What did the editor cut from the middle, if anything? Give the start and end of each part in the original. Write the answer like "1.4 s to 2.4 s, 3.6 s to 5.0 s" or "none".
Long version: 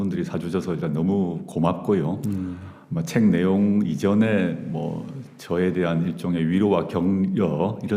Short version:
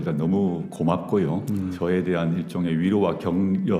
2.5 s to 5.4 s